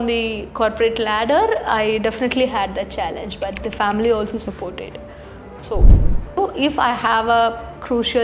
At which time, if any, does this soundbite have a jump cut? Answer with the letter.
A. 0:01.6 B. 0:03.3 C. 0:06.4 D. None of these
C